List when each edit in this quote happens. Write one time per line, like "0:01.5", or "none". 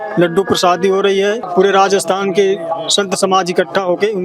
0:01.4